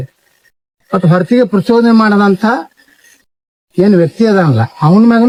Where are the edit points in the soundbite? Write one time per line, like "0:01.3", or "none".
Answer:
none